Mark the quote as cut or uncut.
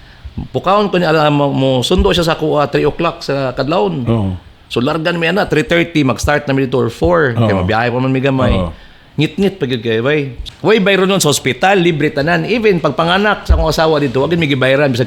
cut